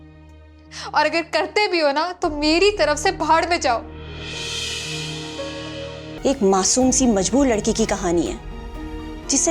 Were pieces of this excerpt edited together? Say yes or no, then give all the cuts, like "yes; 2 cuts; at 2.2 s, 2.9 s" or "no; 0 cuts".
yes; 1 cut; at 6.2 s